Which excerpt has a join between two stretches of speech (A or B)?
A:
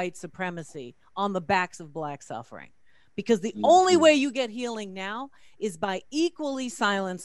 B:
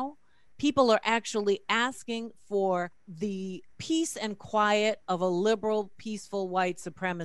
B